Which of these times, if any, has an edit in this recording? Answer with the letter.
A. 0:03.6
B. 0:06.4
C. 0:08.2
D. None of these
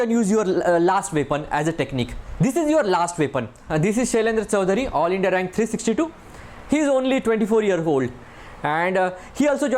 A